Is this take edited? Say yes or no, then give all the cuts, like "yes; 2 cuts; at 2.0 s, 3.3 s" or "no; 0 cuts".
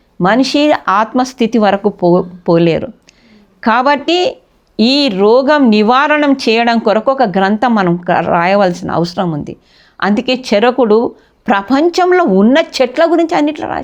no; 0 cuts